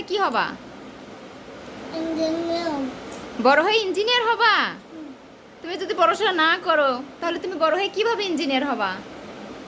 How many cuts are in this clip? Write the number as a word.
zero